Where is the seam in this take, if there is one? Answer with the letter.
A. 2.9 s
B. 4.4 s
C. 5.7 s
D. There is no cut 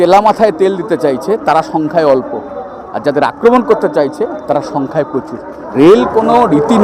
C